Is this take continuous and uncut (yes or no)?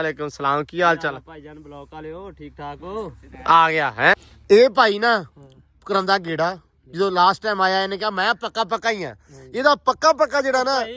no